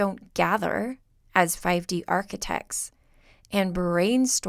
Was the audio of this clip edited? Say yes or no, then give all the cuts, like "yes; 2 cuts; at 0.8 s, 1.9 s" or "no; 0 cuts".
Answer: no; 0 cuts